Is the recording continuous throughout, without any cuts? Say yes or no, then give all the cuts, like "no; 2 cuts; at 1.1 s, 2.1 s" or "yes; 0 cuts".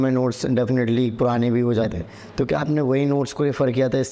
yes; 0 cuts